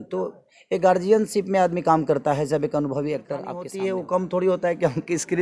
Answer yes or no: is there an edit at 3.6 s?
yes